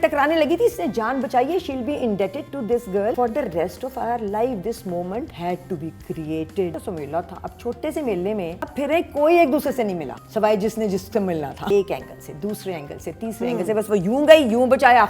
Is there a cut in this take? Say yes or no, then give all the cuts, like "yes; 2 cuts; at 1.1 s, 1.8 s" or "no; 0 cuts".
yes; 6 cuts; at 3.2 s, 5.3 s, 6.7 s, 8.7 s, 10.2 s, 11.7 s